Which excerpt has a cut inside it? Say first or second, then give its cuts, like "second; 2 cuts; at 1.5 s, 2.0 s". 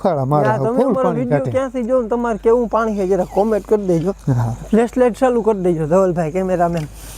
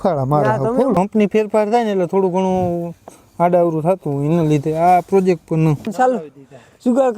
second; 2 cuts; at 0.9 s, 5.9 s